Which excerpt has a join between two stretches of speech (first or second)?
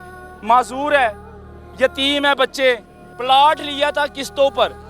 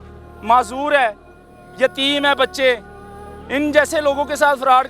first